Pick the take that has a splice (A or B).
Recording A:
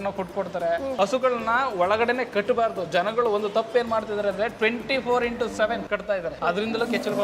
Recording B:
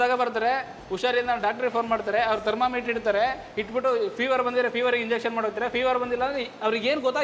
A